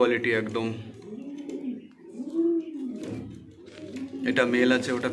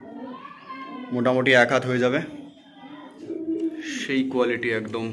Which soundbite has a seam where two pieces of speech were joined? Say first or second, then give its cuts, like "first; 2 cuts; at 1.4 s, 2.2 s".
second; 1 cut; at 3.2 s